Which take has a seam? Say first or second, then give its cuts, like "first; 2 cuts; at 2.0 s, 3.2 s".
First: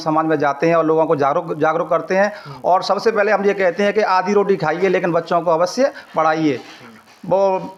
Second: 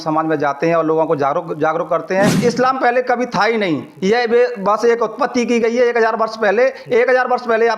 second; 1 cut; at 2.3 s